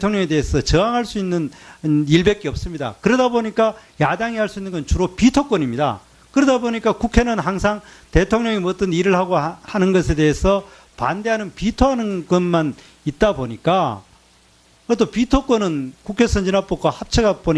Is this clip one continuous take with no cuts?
no; 1 cut; at 4.0 s

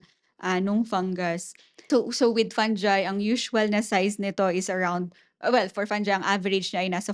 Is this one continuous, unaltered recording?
no; 1 cut; at 1.9 s

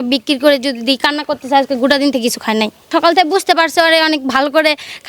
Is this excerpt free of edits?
no; 1 cut; at 2.9 s

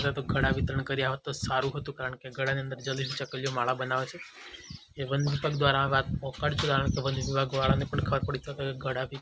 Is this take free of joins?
yes; 0 cuts

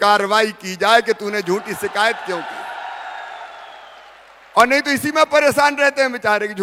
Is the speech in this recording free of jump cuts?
yes; 0 cuts

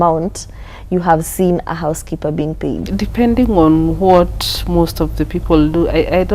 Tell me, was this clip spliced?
yes; 1 cut; at 2.9 s

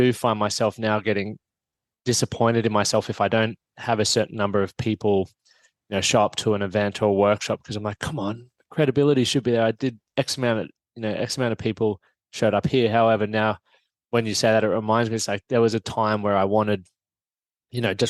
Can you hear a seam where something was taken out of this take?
no; 0 cuts

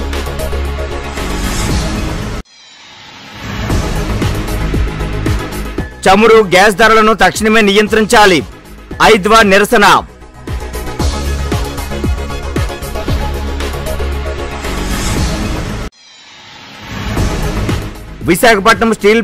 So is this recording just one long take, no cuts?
no; 1 cut; at 2.0 s

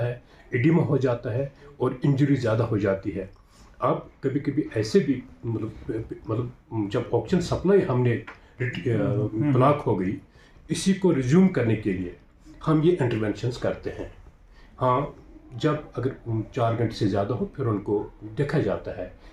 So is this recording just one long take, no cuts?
yes; 0 cuts

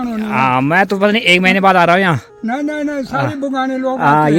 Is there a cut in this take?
no; 0 cuts

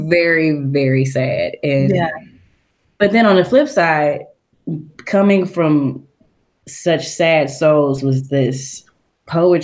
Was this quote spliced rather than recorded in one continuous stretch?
no; 0 cuts

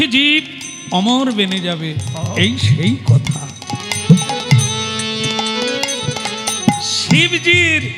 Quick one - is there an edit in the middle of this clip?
no; 0 cuts

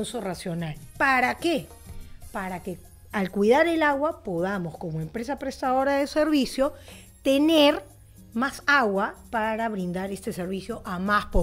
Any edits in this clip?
no; 0 cuts

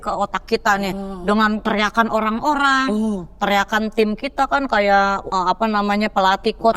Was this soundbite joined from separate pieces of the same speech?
yes; 2 cuts; at 1.6 s, 5.3 s

